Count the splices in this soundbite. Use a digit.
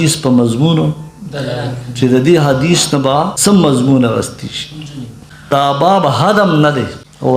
2